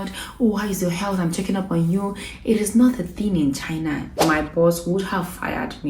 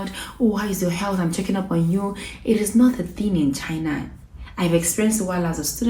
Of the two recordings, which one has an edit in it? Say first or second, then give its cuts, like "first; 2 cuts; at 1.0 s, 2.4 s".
first; 1 cut; at 4.1 s